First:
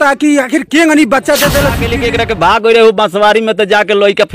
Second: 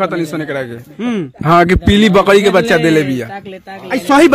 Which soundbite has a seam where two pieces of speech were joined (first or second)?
first